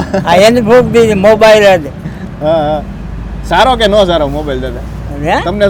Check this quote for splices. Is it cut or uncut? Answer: uncut